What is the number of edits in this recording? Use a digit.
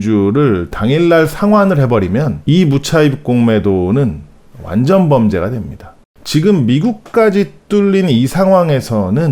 1